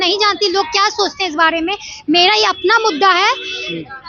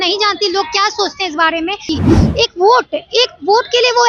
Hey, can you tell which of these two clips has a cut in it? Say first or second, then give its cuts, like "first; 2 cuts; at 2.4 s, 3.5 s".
second; 1 cut; at 2.0 s